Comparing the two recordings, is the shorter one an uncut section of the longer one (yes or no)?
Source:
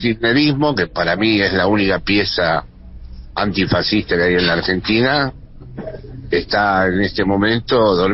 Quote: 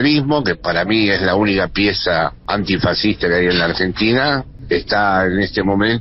no